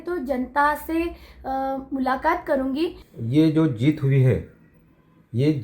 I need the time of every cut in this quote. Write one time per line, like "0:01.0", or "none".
0:03.0